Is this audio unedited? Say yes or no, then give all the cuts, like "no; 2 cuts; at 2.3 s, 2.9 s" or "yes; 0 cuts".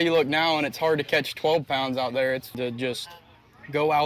no; 1 cut; at 2.6 s